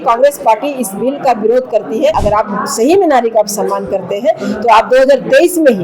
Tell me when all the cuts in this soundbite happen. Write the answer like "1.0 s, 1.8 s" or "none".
2.2 s